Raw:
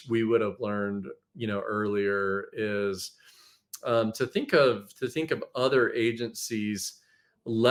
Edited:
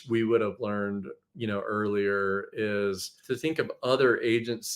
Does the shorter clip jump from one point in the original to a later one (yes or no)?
yes